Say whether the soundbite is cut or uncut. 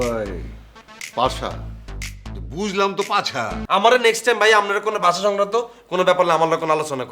cut